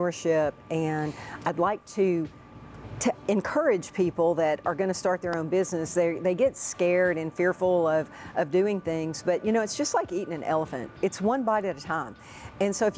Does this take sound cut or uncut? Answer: uncut